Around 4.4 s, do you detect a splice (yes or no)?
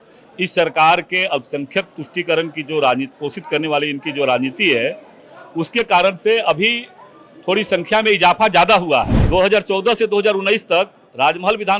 no